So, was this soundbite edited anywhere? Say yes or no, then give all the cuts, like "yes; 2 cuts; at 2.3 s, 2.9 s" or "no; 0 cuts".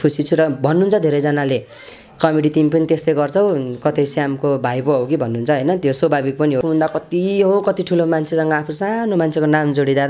yes; 1 cut; at 6.6 s